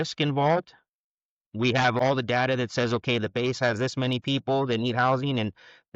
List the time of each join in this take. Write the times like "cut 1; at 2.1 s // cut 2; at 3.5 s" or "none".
cut 1; at 2.0 s